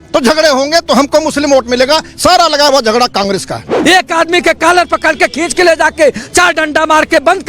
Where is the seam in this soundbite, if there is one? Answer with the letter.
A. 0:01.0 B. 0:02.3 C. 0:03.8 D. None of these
C